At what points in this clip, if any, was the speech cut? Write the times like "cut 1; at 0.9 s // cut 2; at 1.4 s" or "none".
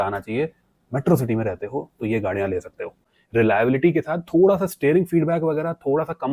cut 1; at 3.0 s

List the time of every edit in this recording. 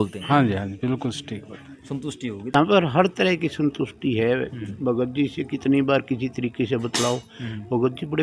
cut 1; at 2.5 s

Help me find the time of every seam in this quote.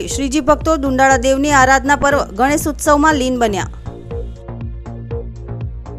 cut 1; at 3.7 s // cut 2; at 5.1 s

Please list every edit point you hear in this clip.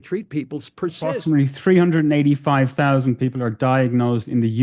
cut 1; at 1.2 s

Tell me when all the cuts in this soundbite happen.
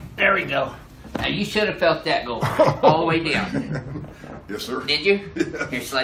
none

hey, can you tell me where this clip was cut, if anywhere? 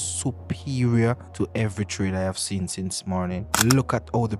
cut 1; at 1.4 s // cut 2; at 3.5 s

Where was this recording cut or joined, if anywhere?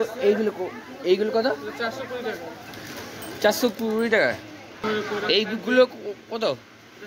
cut 1; at 4.8 s

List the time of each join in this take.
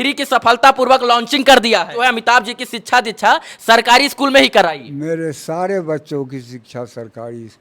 cut 1; at 1.9 s

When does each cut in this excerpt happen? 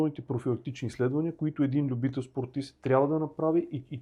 none

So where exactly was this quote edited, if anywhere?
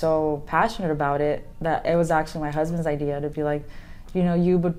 none

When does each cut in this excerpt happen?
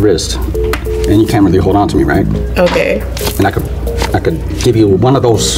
none

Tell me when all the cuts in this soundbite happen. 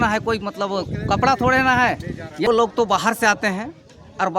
cut 1; at 2.5 s

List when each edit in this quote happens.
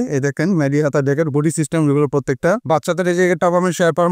cut 1; at 2.6 s

